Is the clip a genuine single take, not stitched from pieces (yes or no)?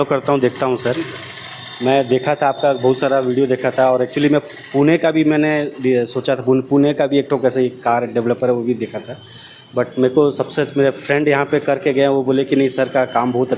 yes